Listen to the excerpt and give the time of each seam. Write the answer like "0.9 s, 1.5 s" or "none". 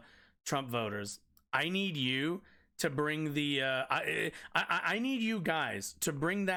none

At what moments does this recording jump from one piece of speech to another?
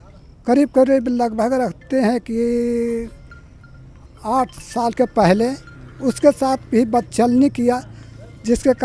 none

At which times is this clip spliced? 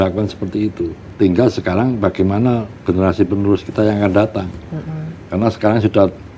1.0 s

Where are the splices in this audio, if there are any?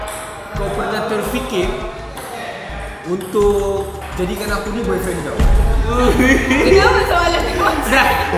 none

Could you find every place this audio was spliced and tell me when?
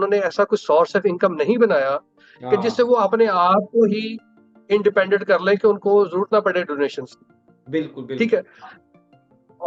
none

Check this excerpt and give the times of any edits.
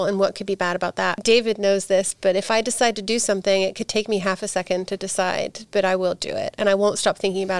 1.2 s

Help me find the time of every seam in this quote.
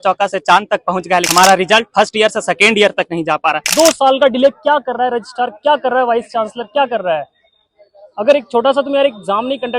1.3 s, 3.6 s

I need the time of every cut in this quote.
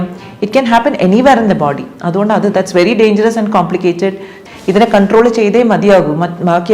4.4 s

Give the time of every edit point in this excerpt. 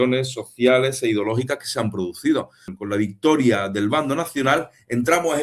2.7 s

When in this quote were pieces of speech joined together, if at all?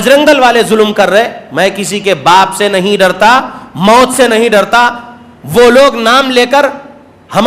none

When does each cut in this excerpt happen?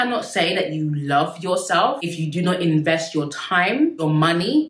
none

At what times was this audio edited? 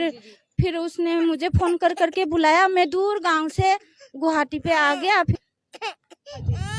5.4 s

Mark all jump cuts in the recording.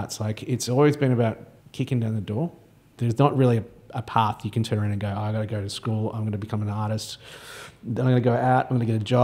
1.5 s, 2.9 s

